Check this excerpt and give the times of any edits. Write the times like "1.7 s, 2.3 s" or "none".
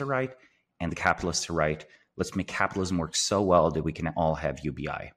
none